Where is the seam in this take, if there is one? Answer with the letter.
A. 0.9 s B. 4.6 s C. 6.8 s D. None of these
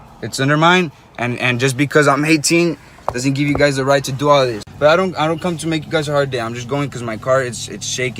B